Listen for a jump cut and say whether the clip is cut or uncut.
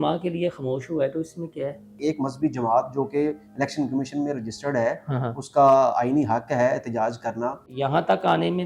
cut